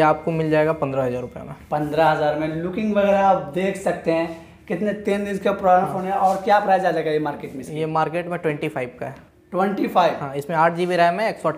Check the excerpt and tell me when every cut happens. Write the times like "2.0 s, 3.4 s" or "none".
none